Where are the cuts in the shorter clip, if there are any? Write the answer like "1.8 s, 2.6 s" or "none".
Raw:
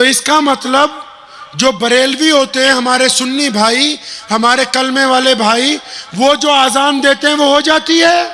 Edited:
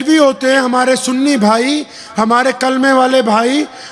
none